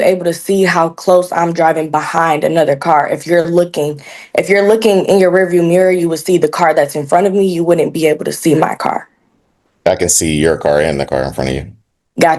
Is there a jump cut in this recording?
no; 0 cuts

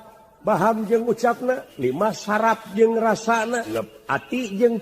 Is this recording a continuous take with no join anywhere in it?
no; 2 cuts; at 1.7 s, 3.7 s

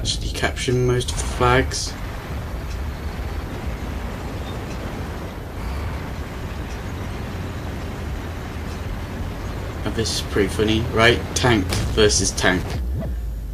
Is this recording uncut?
no; 1 cut; at 11.1 s

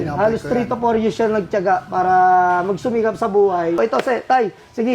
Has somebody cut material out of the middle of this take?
yes; 1 cut; at 3.8 s

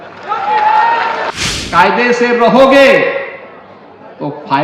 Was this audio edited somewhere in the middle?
yes; 1 cut; at 1.3 s

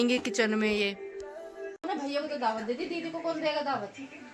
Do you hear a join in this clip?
yes; 1 cut; at 1.9 s

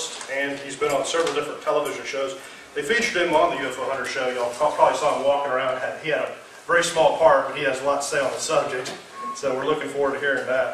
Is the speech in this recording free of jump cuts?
no; 1 cut; at 8.2 s

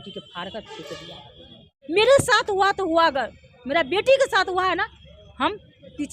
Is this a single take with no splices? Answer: no; 1 cut; at 1.7 s

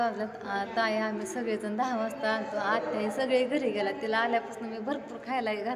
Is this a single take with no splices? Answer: yes; 0 cuts

